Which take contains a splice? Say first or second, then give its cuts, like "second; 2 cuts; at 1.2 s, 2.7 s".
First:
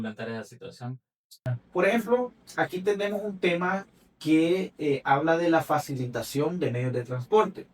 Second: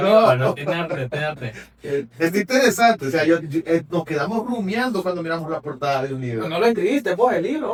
first; 1 cut; at 1.2 s